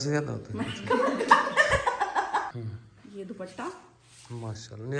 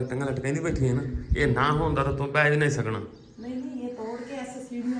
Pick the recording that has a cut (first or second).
first